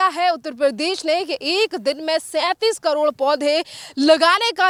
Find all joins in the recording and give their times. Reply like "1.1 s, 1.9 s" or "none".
none

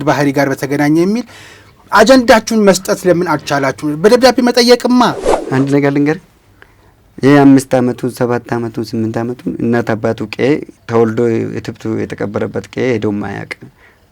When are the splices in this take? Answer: 5.3 s

